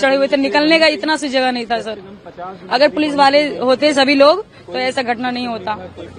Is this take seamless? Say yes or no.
yes